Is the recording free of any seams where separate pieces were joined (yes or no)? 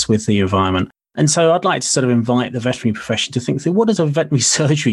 no